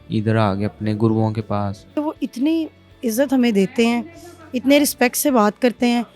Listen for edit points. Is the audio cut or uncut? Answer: cut